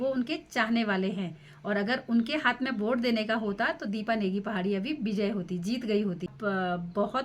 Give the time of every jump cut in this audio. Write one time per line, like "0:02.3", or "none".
0:06.4